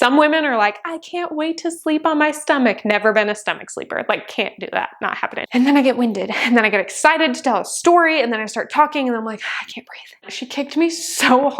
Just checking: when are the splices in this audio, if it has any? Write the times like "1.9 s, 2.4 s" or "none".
5.4 s, 10.3 s

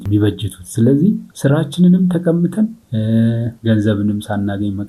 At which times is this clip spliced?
1.3 s, 2.8 s, 3.5 s

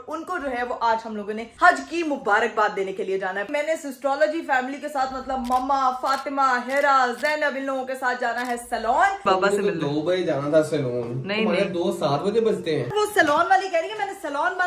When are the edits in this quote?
3.5 s, 9.2 s, 12.9 s

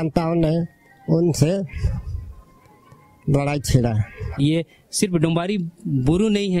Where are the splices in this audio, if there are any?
4.3 s

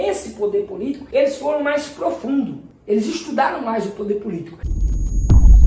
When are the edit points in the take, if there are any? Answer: 1.0 s, 4.5 s

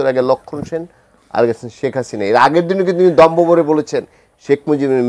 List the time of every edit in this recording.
none

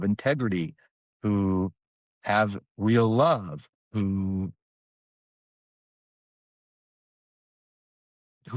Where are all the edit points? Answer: none

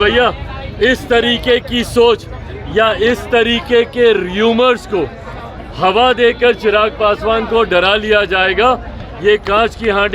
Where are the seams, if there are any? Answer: none

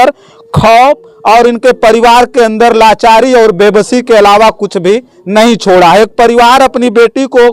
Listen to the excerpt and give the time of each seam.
none

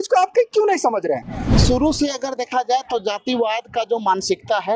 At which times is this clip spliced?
1.4 s

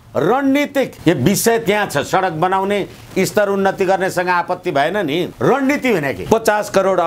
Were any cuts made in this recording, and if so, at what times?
0.9 s, 5.3 s, 6.2 s

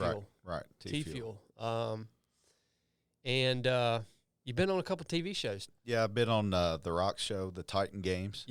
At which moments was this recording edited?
5.7 s

